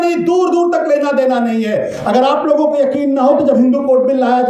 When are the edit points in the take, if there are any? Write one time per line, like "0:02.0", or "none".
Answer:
none